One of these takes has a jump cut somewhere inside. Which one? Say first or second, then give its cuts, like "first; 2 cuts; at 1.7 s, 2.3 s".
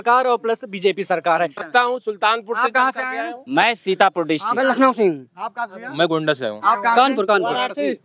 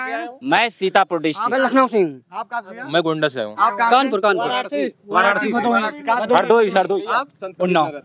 first; 1 cut; at 1.7 s